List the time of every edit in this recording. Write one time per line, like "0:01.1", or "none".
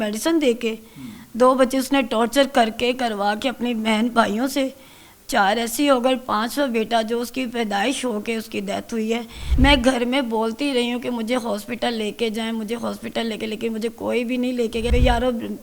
0:09.4
0:14.9